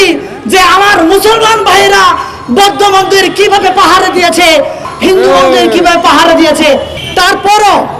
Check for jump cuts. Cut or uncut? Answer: cut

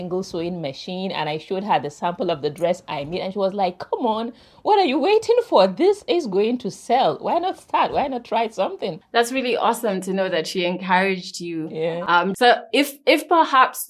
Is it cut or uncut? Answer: uncut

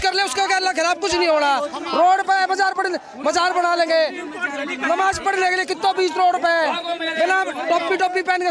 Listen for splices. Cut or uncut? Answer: uncut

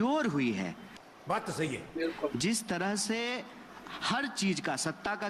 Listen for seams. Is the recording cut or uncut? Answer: uncut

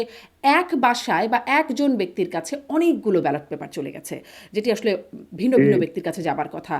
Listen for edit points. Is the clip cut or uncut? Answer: uncut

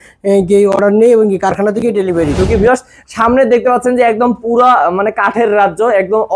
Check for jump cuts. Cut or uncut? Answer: cut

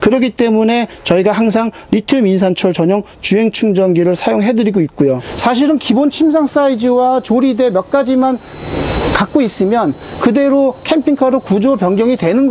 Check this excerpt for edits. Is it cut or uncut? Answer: cut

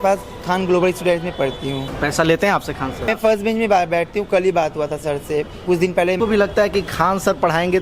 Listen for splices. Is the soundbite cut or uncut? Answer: cut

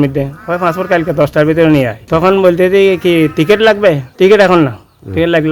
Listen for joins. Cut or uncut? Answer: cut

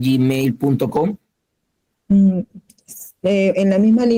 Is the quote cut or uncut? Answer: uncut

